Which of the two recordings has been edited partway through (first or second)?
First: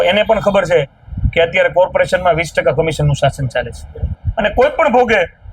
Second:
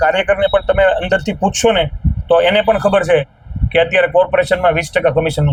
first